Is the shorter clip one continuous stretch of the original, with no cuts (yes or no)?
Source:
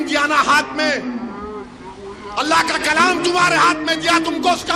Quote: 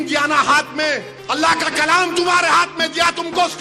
no